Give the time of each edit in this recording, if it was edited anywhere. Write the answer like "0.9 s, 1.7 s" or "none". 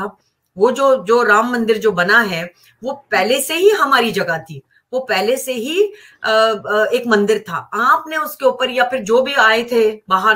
none